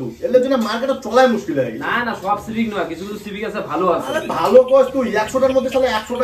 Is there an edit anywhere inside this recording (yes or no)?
no